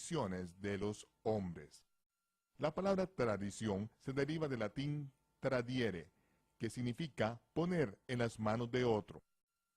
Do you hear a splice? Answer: yes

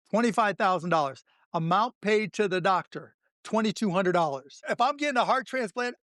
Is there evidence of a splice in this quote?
yes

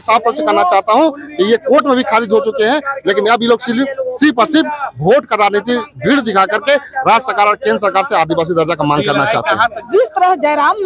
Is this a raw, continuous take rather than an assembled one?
no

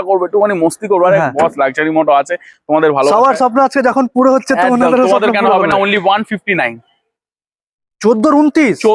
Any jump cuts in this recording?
no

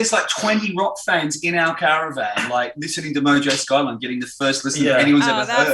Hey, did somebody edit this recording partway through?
no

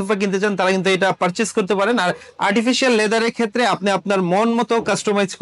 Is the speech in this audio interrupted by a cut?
no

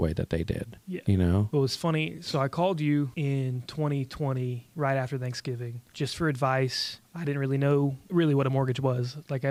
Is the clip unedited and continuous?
yes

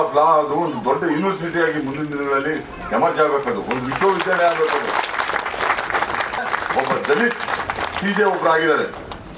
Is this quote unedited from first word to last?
no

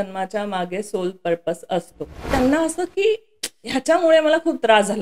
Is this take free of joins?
no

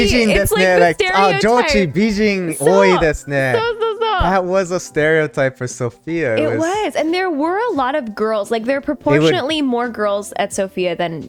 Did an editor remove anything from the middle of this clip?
no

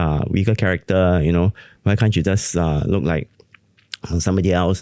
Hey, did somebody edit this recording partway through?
no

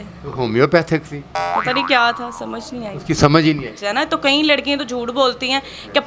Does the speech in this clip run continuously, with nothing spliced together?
no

